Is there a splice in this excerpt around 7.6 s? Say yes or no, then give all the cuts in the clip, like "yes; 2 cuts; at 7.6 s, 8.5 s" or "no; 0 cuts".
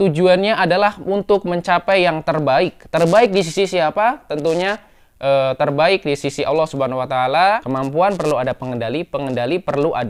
yes; 1 cut; at 7.6 s